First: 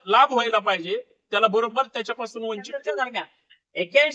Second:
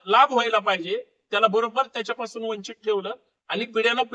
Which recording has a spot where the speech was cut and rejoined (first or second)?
first